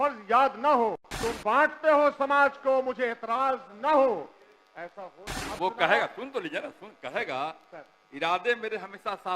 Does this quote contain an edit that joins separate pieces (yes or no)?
yes